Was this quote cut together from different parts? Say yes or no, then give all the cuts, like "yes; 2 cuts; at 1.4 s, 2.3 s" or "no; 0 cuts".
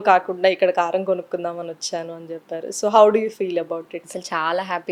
no; 0 cuts